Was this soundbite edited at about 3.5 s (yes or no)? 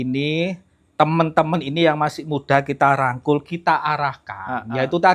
no